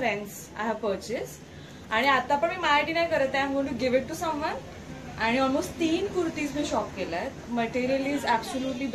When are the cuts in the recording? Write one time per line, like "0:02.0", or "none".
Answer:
none

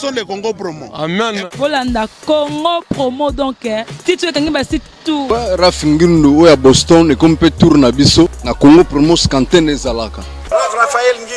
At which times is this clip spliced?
0:05.2
0:08.4
0:10.4

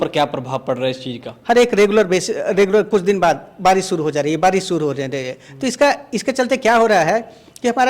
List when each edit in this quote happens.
0:01.3

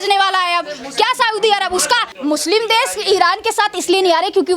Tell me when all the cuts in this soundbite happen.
0:02.1

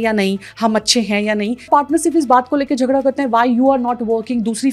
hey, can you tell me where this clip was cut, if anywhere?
0:01.7

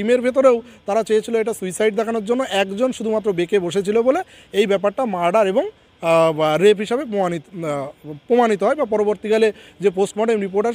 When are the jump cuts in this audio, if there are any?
none

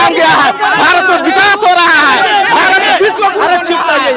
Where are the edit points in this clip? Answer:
none

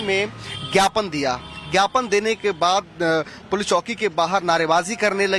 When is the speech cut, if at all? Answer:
none

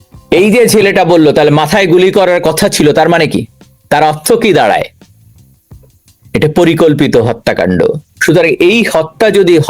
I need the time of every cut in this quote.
0:08.1

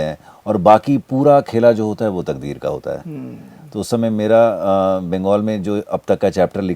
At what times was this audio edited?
none

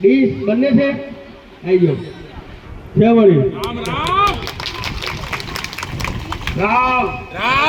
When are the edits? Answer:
none

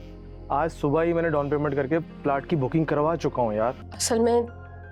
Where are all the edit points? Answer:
0:03.9

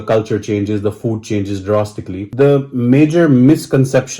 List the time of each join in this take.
0:02.3

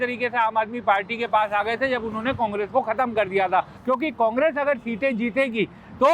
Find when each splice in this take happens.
0:03.7

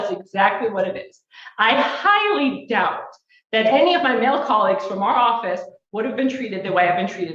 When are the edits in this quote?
0:04.6

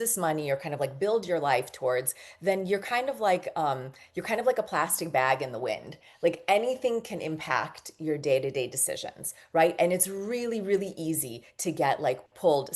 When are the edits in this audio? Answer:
none

